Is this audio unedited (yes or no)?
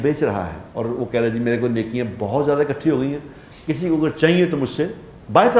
yes